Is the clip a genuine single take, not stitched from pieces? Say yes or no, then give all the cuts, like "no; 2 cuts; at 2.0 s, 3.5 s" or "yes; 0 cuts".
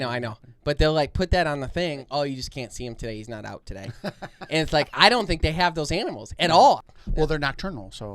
no; 2 cuts; at 2.1 s, 6.9 s